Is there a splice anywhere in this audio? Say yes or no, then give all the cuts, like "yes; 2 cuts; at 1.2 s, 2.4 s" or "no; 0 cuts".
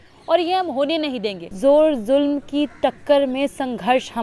yes; 1 cut; at 1.5 s